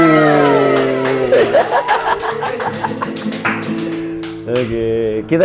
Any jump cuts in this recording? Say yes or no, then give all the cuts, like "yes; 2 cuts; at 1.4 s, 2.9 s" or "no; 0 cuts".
no; 0 cuts